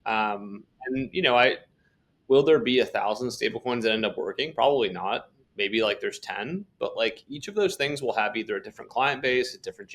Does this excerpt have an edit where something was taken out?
no; 0 cuts

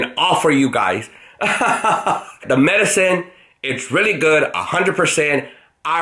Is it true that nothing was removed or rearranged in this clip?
no; 1 cut; at 2.4 s

